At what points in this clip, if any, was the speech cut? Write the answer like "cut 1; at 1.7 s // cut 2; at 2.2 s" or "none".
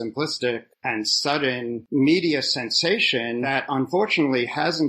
cut 1; at 1.8 s // cut 2; at 3.5 s